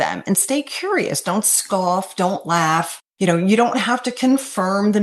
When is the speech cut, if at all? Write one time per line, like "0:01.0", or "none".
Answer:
0:03.0